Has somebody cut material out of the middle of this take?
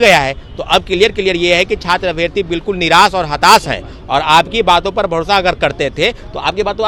no; 0 cuts

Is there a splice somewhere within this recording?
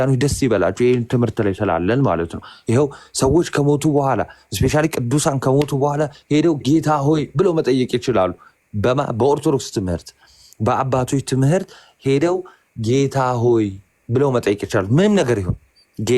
no; 0 cuts

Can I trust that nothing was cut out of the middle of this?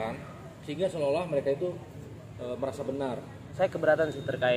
no; 1 cut; at 3.5 s

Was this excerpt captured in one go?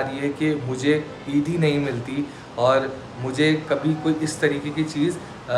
yes; 0 cuts

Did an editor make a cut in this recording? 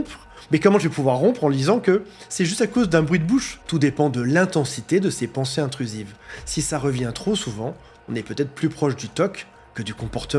yes; 1 cut; at 3.6 s

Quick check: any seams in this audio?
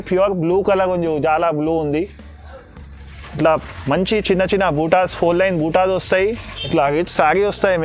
yes; 1 cut; at 6.5 s

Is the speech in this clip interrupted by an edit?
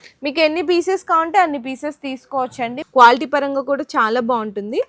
yes; 1 cut; at 2.8 s

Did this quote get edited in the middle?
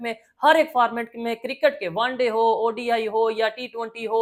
no; 0 cuts

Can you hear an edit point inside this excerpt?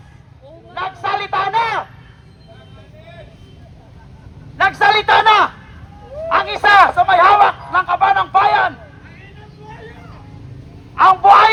no; 0 cuts

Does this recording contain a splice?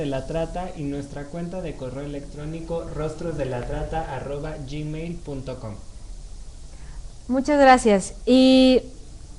yes; 1 cut; at 2.3 s

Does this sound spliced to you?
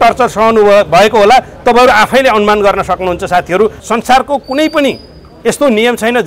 yes; 1 cut; at 3.8 s

